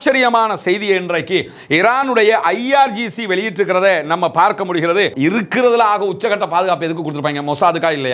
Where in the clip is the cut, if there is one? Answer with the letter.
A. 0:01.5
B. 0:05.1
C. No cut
B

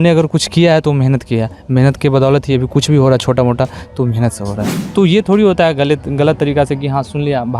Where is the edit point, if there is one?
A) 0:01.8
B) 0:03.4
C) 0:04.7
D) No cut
C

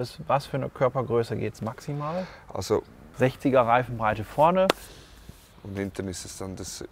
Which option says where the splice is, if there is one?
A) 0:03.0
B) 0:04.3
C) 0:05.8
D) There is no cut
A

